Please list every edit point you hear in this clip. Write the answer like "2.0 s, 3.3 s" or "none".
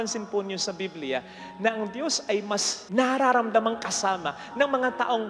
2.8 s